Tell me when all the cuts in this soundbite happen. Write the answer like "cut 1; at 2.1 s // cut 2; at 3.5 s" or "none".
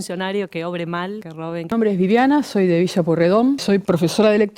cut 1; at 1.7 s // cut 2; at 3.6 s